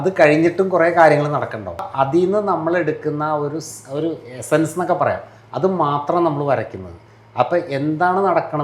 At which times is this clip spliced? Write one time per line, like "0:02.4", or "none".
0:01.9